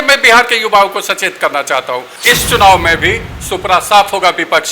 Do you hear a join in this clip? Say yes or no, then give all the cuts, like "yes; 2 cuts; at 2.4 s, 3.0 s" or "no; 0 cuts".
yes; 1 cut; at 2.1 s